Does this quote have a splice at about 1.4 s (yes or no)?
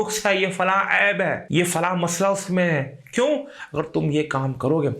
yes